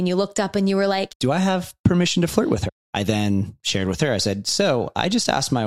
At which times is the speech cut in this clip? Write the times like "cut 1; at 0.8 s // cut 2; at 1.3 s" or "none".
cut 1; at 1.1 s // cut 2; at 2.6 s